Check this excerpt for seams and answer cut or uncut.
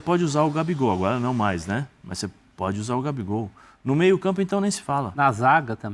uncut